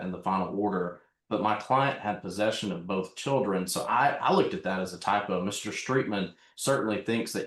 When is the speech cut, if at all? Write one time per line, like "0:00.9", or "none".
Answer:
none